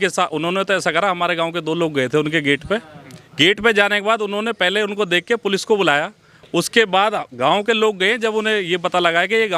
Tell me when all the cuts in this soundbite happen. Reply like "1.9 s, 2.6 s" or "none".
none